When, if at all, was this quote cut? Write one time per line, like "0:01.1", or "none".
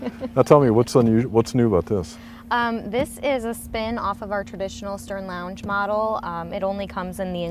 0:05.5